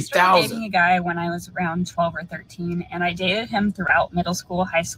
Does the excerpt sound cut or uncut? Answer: uncut